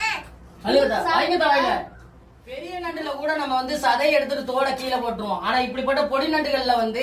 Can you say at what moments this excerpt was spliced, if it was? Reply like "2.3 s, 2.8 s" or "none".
2.6 s